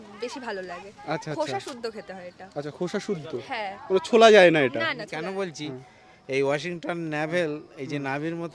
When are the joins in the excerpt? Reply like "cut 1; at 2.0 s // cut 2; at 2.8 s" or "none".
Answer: cut 1; at 5.1 s